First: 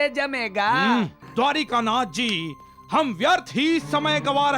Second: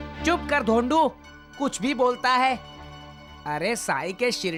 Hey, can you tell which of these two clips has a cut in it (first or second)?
first